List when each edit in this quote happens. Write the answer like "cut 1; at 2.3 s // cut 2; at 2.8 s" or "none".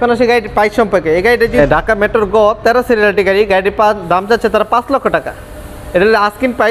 cut 1; at 1.6 s